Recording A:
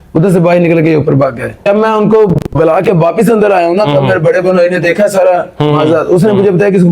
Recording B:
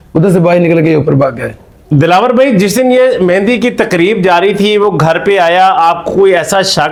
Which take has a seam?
A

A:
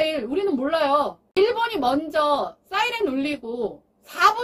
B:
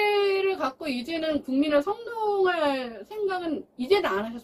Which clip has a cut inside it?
A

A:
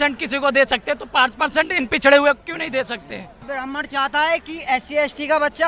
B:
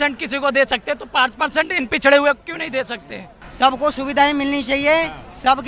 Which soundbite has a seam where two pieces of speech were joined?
A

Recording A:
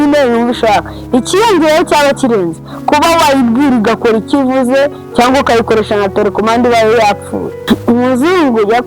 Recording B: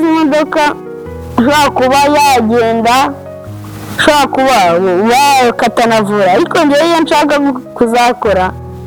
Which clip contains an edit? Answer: A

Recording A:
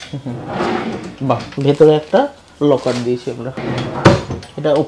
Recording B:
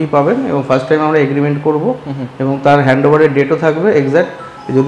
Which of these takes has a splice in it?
A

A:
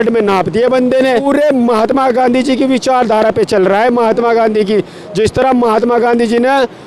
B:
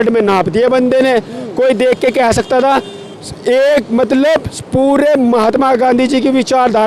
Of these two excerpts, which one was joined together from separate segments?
A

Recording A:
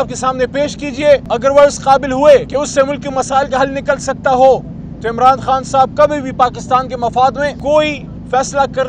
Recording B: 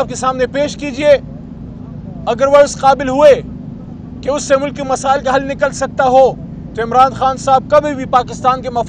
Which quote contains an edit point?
A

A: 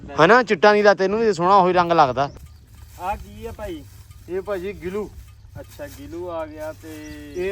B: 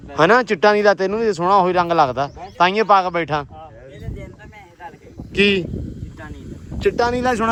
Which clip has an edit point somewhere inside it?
A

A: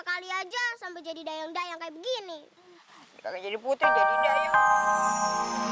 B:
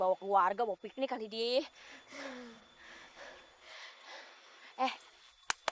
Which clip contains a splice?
A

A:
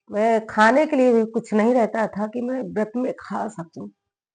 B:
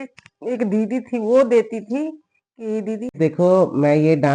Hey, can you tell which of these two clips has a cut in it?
B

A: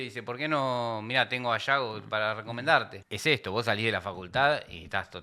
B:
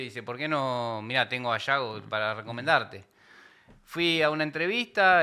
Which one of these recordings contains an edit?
A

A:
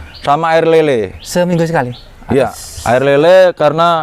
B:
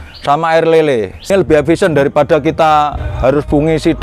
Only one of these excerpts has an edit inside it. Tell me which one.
B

